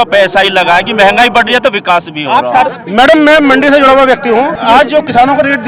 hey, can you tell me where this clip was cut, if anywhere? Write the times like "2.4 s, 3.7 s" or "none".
2.8 s, 4.5 s